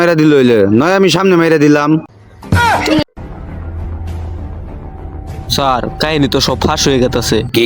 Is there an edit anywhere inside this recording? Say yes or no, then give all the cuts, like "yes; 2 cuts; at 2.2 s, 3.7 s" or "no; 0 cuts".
yes; 2 cuts; at 3.1 s, 4.8 s